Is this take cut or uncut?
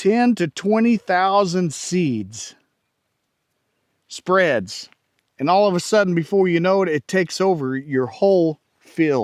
uncut